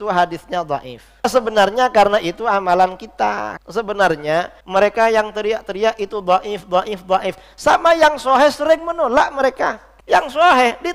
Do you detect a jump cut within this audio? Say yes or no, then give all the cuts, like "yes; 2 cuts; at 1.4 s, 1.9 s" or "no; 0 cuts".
yes; 4 cuts; at 1.2 s, 3.5 s, 4.6 s, 9.9 s